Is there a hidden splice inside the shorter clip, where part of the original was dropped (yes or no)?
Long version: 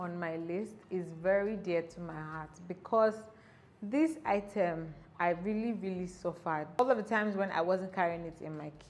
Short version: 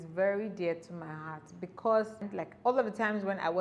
yes